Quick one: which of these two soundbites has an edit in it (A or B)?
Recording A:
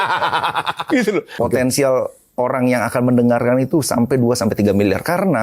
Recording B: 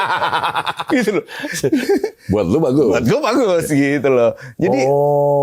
A